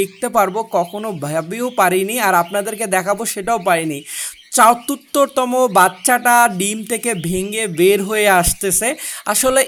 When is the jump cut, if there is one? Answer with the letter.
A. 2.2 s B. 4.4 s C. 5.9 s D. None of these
D